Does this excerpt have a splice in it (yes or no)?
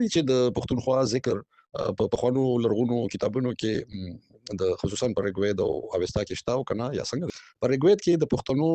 yes